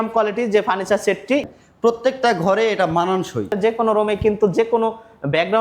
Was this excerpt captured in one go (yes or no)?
no